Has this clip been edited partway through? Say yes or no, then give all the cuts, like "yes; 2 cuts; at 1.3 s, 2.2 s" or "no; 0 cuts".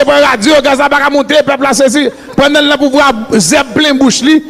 yes; 1 cut; at 2.2 s